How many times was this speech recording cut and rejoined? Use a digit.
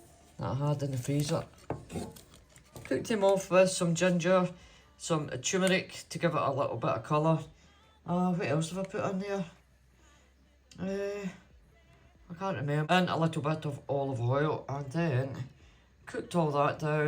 2